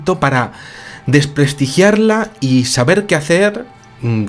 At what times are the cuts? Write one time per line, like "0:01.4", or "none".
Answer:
0:01.3